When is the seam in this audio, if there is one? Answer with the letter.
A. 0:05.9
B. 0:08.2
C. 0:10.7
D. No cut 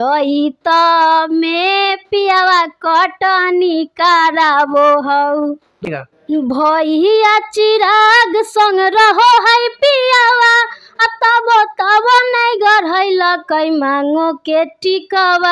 A